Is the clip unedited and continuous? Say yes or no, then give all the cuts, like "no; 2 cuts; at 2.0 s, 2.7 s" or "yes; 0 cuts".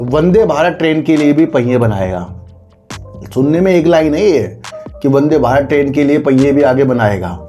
yes; 0 cuts